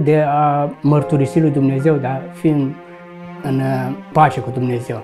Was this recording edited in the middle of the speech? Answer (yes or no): yes